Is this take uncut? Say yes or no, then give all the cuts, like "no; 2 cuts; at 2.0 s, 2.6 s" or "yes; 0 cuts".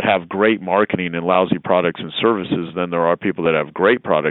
yes; 0 cuts